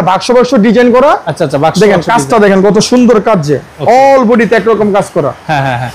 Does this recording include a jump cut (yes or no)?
no